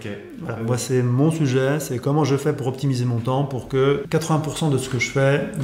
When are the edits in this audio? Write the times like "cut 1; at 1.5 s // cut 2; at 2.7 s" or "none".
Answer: cut 1; at 4.0 s